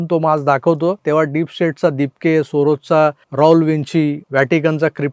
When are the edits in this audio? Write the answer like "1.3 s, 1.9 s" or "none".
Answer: 1.0 s, 3.2 s, 4.2 s